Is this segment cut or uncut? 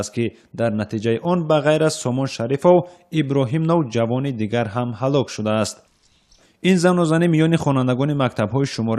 cut